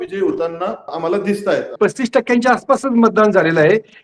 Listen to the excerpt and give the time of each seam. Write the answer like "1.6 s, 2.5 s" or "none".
0.9 s, 1.7 s